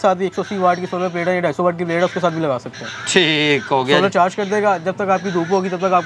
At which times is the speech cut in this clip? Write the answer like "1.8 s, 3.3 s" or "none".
none